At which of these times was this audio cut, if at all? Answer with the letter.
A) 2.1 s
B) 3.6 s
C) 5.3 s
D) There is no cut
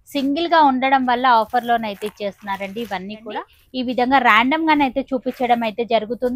B